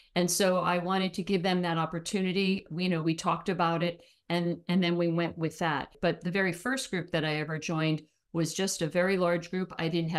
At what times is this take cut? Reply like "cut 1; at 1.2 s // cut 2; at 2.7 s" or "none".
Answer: cut 1; at 5.9 s